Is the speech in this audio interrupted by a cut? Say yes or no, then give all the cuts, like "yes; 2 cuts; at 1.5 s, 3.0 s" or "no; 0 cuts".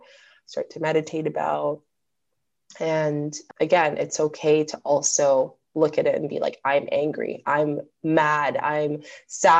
no; 0 cuts